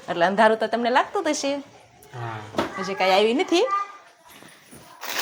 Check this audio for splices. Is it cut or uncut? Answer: uncut